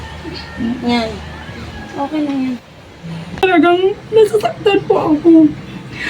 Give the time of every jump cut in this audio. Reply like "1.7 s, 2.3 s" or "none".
3.4 s